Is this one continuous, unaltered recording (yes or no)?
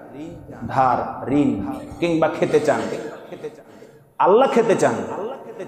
yes